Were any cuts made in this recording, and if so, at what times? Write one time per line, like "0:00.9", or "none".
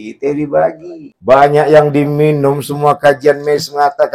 0:01.3

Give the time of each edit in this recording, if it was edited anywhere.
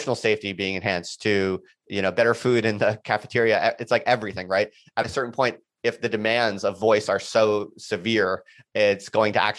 none

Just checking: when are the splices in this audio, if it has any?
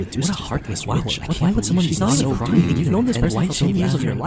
none

